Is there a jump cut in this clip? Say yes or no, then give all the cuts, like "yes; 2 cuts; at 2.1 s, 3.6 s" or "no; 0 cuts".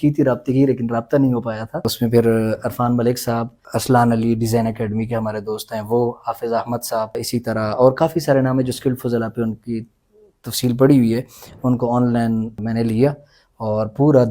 yes; 4 cuts; at 1.9 s, 3.6 s, 7.2 s, 12.6 s